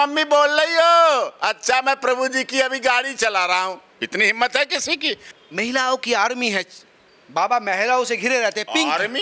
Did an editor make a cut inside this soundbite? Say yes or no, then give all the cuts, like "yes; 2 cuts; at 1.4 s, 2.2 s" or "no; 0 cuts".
yes; 1 cut; at 5.3 s